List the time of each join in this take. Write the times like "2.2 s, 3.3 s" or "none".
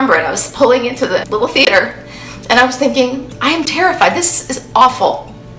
1.2 s

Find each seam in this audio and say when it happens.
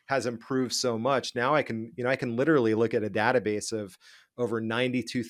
none

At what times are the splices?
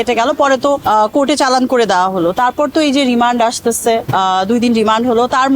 none

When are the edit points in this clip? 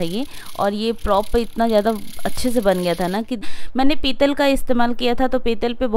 3.5 s

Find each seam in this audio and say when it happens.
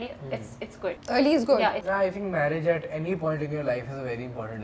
1.0 s, 1.8 s

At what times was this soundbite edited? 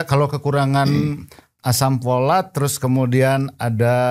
none

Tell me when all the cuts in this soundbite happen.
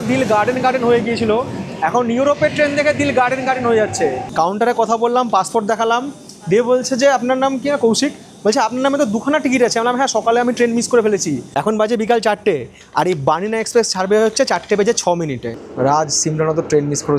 4.2 s, 11.5 s, 15.6 s

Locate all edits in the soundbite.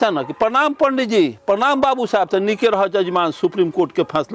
none

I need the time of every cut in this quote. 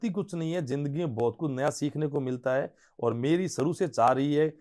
none

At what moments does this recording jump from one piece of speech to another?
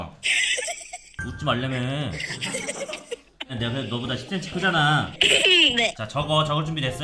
3.5 s

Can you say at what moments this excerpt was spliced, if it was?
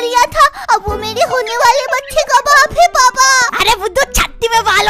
3.5 s

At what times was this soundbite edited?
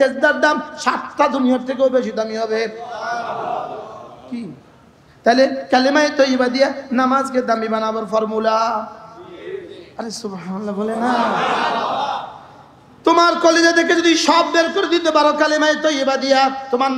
none

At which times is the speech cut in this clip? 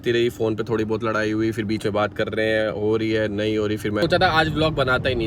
4.0 s

